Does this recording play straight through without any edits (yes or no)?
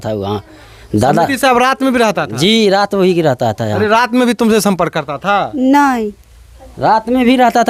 yes